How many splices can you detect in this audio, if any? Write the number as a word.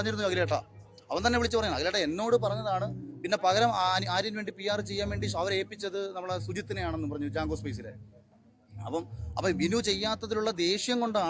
zero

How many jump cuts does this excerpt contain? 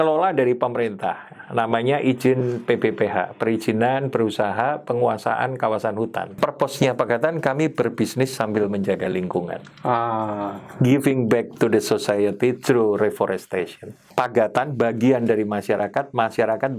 three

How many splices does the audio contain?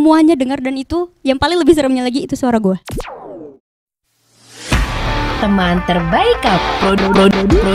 one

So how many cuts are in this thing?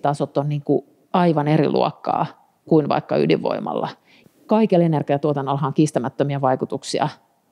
one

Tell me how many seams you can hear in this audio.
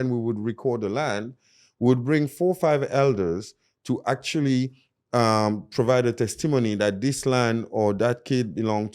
zero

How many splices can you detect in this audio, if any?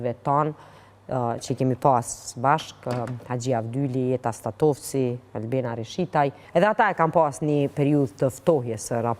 one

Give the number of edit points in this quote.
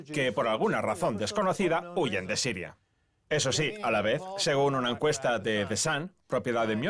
one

